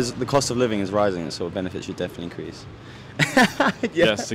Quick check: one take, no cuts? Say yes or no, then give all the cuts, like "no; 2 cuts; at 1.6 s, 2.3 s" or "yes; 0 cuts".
yes; 0 cuts